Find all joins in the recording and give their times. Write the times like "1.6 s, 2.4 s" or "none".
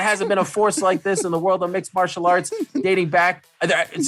none